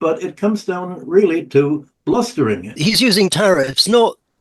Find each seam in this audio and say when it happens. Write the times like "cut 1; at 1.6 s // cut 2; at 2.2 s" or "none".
cut 1; at 2.7 s